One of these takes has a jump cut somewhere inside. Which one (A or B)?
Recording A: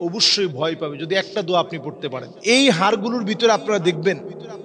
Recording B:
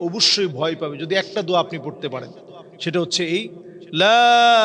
A